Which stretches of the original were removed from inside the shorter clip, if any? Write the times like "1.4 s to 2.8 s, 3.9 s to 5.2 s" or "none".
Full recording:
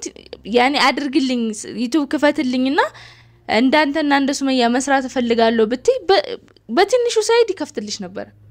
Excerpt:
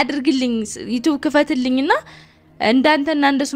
none